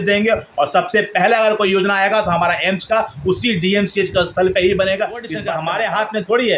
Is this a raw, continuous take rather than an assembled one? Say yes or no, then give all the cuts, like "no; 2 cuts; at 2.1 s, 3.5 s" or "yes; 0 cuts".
no; 1 cut; at 5.4 s